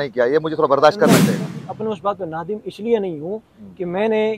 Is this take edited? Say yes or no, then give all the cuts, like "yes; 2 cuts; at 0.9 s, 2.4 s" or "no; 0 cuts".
yes; 1 cut; at 1.3 s